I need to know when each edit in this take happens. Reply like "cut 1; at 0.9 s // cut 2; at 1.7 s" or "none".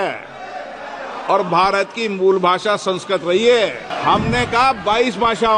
cut 1; at 3.9 s